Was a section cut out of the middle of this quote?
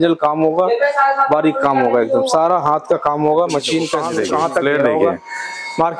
yes; 1 cut; at 4.0 s

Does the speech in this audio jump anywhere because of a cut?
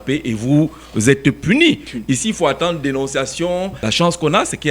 yes; 1 cut; at 3.8 s

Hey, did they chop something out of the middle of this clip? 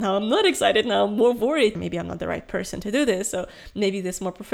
yes; 1 cut; at 1.8 s

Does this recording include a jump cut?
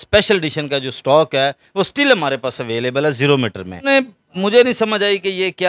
yes; 1 cut; at 3.9 s

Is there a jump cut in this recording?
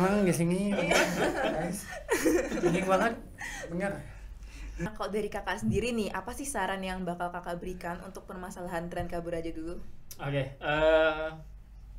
no; 0 cuts

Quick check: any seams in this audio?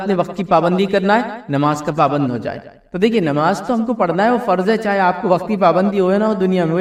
no; 0 cuts

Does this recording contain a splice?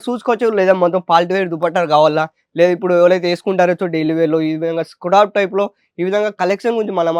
no; 0 cuts

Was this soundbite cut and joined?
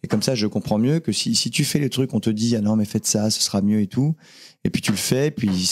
no; 0 cuts

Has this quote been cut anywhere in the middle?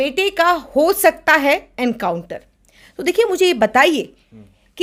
no; 0 cuts

